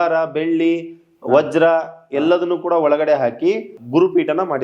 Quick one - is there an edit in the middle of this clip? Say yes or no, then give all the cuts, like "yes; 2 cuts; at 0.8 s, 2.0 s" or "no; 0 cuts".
yes; 1 cut; at 3.7 s